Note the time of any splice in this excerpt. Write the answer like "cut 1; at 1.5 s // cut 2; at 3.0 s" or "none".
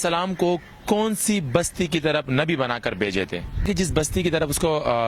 cut 1; at 3.6 s